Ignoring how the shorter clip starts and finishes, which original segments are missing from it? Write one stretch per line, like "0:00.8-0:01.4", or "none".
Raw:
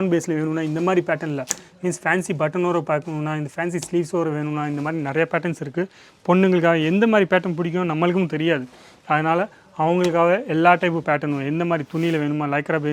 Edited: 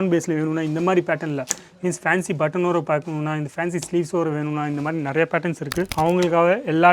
0:05.9-0:09.7